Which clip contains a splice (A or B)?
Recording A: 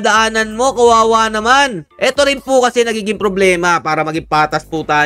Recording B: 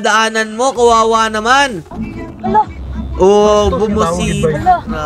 B